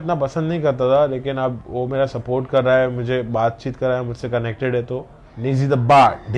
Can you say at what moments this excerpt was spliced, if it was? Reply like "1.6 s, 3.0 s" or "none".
5.2 s